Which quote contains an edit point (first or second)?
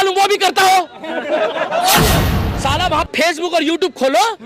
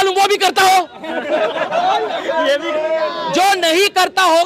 first